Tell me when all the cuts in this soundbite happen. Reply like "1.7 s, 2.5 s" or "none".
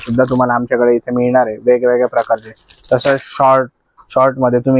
none